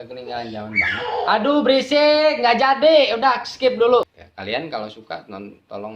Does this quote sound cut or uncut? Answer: cut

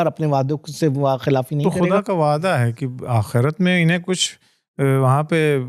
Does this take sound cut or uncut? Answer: cut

